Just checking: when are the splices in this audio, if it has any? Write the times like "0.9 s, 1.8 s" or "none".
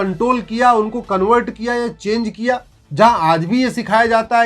2.8 s